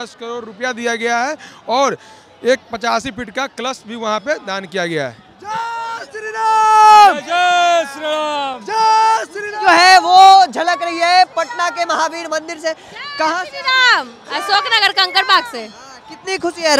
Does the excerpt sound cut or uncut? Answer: uncut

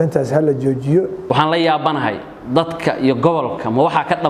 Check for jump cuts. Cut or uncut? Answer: cut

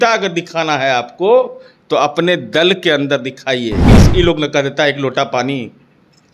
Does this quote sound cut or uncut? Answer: cut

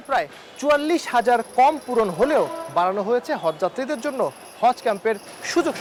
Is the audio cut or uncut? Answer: uncut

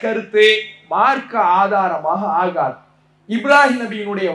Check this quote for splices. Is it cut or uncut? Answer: uncut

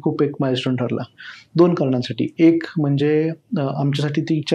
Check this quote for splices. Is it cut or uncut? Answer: uncut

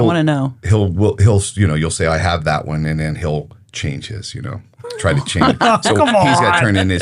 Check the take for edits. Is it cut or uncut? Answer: uncut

